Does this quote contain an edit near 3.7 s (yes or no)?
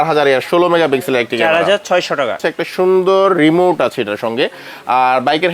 no